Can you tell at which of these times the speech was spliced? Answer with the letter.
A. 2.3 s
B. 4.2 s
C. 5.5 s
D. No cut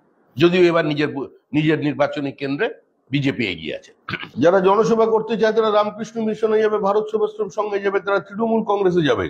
B